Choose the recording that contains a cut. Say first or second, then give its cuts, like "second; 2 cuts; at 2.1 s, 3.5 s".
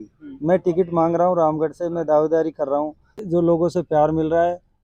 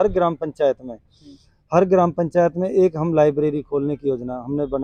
first; 1 cut; at 3.2 s